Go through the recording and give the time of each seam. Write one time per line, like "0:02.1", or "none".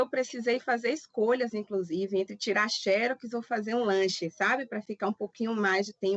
none